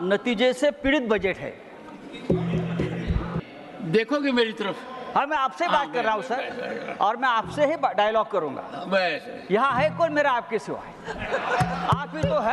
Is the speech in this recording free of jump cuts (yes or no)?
no